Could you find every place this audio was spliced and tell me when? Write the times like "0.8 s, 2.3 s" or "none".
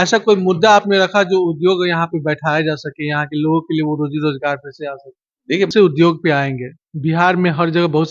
5.7 s